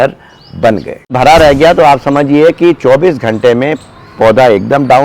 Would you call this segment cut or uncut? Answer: cut